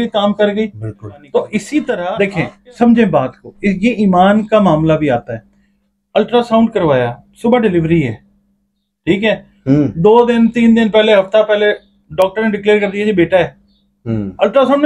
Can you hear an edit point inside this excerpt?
yes; 1 cut; at 2.1 s

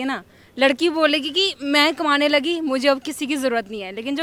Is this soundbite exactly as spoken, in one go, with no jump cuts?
yes; 0 cuts

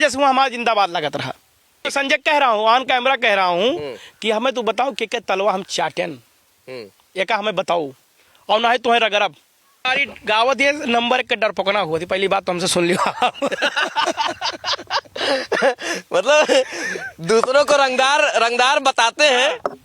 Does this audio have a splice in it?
yes; 2 cuts; at 1.8 s, 9.9 s

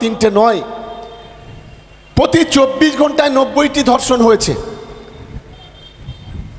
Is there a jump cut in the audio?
no; 0 cuts

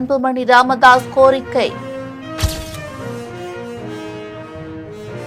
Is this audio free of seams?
yes; 0 cuts

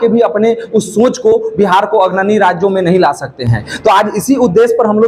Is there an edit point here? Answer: no; 0 cuts

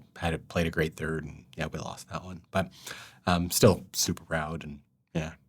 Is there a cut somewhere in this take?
yes; 1 cut; at 1.3 s

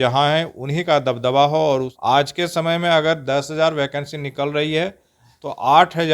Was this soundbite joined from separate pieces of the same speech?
yes; 1 cut; at 1.9 s

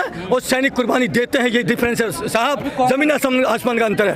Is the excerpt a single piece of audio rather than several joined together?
yes; 0 cuts

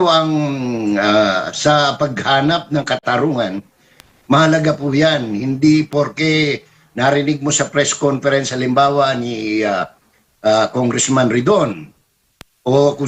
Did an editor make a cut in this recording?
no; 0 cuts

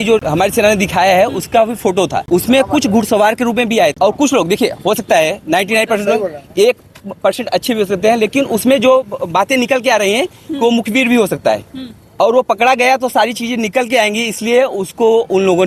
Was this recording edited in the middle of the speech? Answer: no; 0 cuts

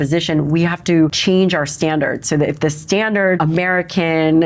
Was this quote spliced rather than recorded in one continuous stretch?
yes; 2 cuts; at 1.2 s, 3.4 s

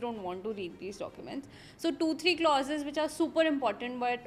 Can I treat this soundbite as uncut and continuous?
yes; 0 cuts

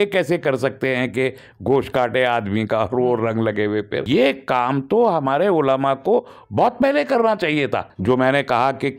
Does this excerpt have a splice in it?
yes; 2 cuts; at 4.0 s, 7.9 s

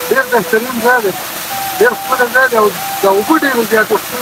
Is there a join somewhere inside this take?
no; 0 cuts

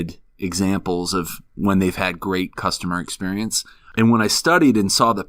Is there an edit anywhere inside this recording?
yes; 1 cut; at 3.8 s

